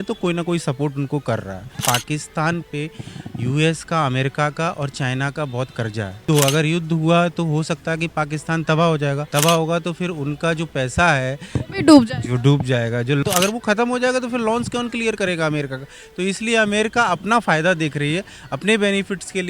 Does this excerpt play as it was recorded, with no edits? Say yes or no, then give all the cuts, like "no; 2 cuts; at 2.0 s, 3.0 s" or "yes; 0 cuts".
no; 4 cuts; at 1.8 s, 6.2 s, 9.2 s, 13.2 s